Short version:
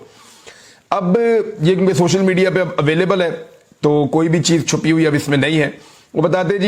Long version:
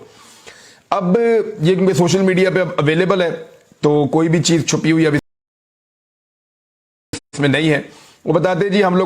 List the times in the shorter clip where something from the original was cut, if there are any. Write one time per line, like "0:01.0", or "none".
0:05.2